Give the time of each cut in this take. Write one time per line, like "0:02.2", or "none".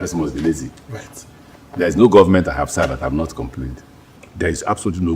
none